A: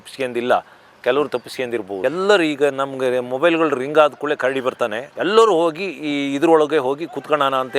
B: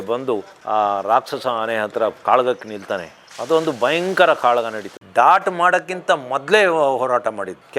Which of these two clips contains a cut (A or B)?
B